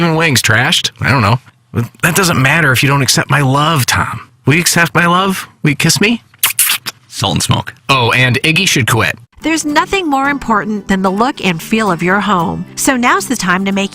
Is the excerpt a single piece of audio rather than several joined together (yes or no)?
no